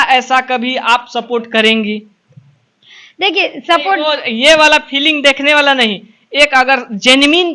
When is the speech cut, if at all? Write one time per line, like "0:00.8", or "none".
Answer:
none